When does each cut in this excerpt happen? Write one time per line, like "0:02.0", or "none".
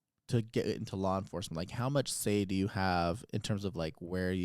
none